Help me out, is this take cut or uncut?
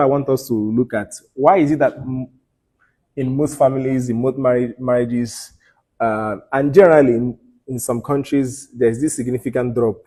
uncut